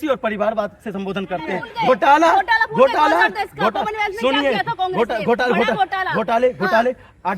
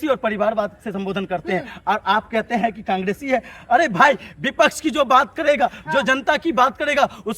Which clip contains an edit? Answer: first; 1 cut; at 1.7 s

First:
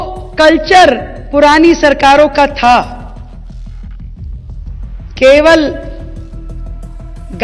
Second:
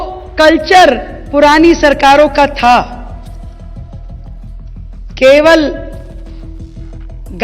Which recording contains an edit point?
second; 2 cuts; at 3.1 s, 5.2 s

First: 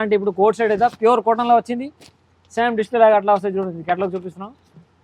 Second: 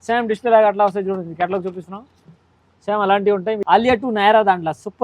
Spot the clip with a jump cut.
second; 1 cut; at 3.6 s

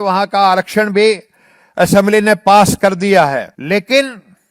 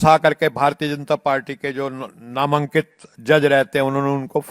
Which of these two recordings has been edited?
first; 1 cut; at 3.5 s

